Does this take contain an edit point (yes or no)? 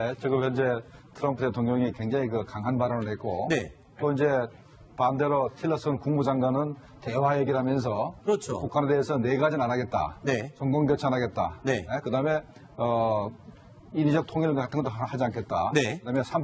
no